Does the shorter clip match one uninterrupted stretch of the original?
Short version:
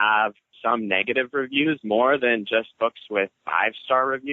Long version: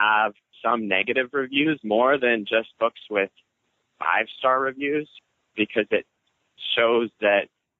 no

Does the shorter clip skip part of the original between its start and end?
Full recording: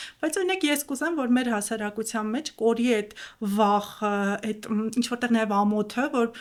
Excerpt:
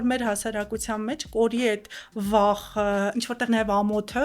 yes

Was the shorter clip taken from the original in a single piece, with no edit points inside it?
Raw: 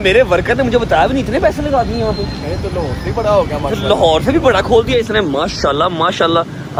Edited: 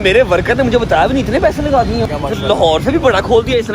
no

